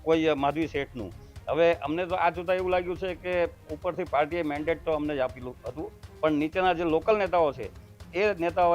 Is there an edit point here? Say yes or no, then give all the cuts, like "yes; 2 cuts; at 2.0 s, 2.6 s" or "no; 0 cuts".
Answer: no; 0 cuts